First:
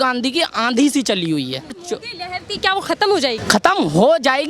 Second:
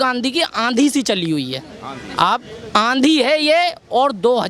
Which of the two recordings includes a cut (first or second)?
first